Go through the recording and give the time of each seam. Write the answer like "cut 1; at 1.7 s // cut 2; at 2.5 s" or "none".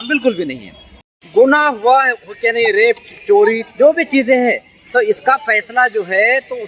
cut 1; at 1.0 s